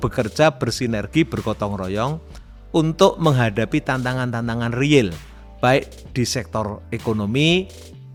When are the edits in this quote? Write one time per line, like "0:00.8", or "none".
none